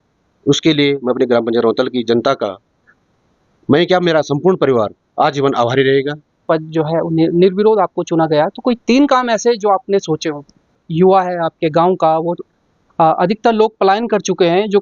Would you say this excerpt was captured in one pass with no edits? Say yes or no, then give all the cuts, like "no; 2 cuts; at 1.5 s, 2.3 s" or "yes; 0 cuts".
no; 2 cuts; at 6.4 s, 10.8 s